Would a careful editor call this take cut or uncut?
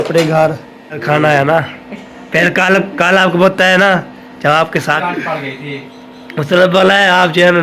cut